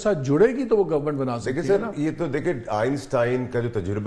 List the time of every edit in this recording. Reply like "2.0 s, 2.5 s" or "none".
none